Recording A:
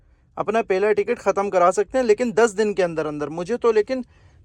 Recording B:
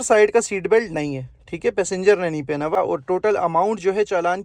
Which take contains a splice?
B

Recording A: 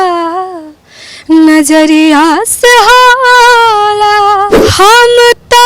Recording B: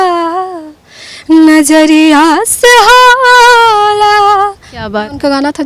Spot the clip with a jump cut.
A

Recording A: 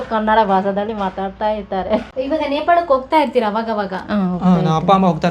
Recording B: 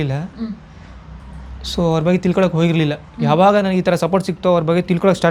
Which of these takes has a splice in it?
A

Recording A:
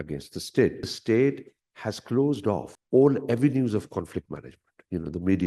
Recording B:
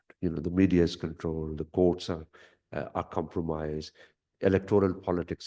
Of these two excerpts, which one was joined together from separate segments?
A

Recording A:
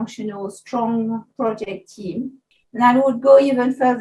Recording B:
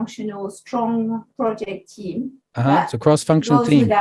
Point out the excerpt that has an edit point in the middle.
A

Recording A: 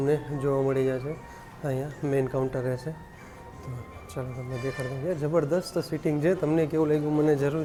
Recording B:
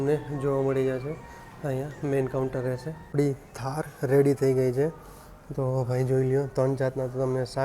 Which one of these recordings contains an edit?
B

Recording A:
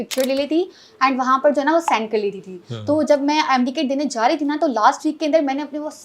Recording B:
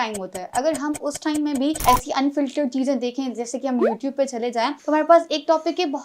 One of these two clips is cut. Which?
B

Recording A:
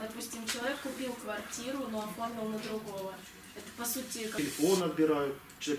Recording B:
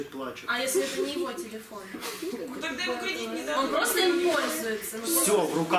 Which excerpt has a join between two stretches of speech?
A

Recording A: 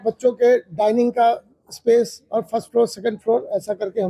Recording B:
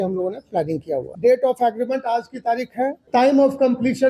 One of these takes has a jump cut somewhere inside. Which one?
B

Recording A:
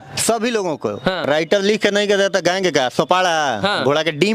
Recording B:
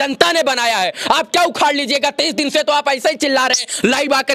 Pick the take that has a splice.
A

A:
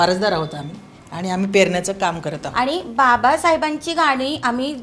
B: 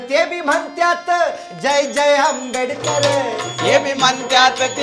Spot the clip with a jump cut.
A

